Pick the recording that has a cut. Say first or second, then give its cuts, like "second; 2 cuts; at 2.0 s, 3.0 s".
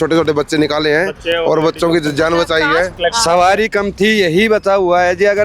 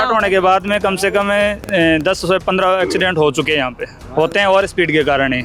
first; 1 cut; at 2.9 s